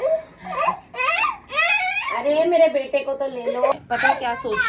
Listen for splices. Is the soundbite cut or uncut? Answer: cut